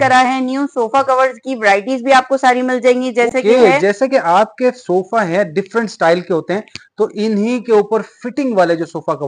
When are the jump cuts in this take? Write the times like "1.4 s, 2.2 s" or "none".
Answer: none